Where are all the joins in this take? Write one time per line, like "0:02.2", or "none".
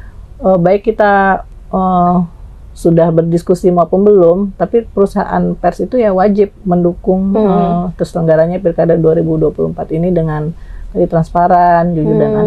none